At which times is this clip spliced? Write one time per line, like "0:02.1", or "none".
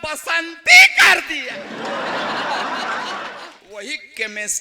0:01.4
0:03.4